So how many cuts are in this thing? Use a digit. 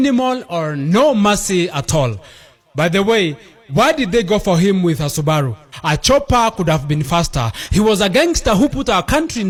0